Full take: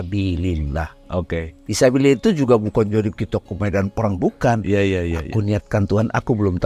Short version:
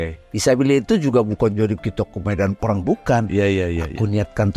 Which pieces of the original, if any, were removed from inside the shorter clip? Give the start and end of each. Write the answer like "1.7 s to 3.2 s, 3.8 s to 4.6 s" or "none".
none

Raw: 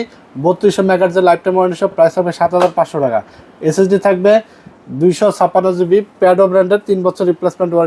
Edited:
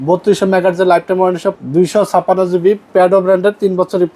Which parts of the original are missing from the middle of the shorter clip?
1.9 s to 4.8 s

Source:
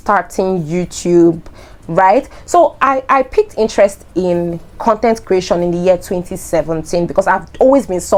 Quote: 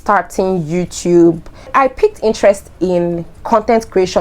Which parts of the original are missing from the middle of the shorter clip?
1.7 s to 3.0 s

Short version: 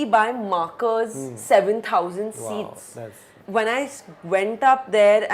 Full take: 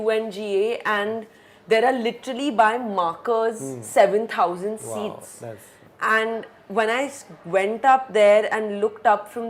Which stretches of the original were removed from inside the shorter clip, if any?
5.8 s to 6.6 s

